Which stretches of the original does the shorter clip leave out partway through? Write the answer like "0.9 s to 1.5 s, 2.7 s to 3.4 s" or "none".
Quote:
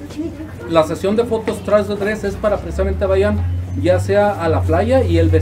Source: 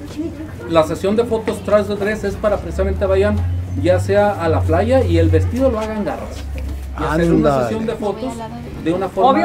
none